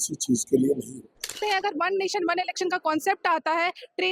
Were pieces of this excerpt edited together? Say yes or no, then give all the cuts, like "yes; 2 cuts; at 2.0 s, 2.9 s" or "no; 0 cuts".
yes; 1 cut; at 1.3 s